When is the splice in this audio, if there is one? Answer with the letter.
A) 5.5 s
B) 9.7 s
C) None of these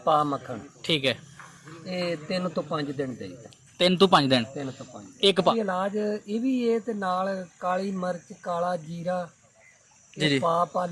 A